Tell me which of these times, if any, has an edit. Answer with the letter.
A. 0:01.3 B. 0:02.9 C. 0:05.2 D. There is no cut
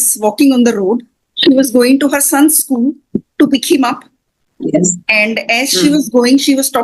A